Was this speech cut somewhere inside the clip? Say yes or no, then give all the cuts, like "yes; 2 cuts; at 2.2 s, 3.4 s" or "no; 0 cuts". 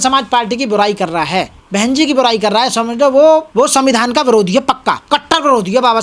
yes; 3 cuts; at 1.6 s, 3.5 s, 5.0 s